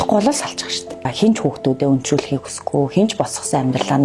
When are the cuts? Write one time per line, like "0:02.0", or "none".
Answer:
0:01.1